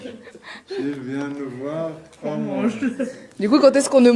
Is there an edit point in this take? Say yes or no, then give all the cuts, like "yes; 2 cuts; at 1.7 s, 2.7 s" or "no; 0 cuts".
no; 0 cuts